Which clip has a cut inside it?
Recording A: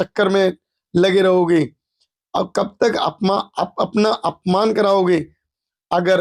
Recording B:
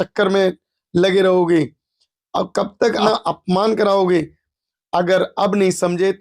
B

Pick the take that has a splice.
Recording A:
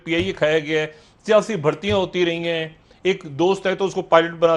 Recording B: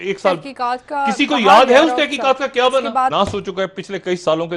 B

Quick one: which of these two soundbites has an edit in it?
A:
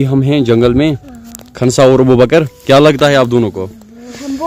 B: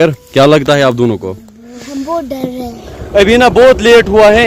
B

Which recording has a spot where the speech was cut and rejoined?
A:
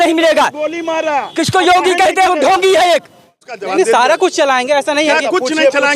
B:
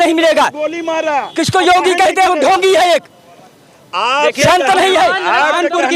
A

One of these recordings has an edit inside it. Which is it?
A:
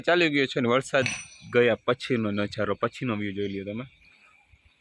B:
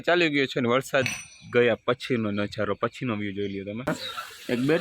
B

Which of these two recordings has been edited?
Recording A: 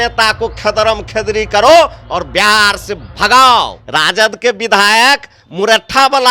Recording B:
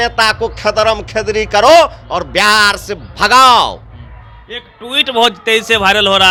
A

